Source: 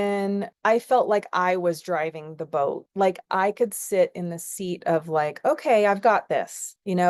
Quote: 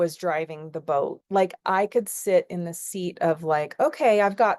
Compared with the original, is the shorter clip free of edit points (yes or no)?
yes